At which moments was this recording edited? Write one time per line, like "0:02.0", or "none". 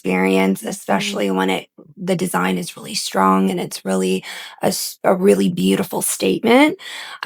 none